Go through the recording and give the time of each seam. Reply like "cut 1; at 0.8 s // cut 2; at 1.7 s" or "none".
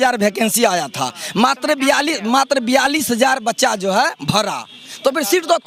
none